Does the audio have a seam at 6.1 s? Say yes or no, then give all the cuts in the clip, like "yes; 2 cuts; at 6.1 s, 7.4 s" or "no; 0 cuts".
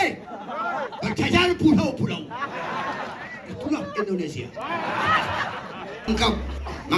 yes; 1 cut; at 6.1 s